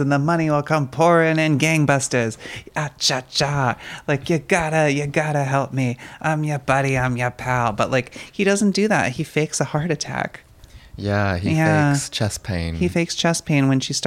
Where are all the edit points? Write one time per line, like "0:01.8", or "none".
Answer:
none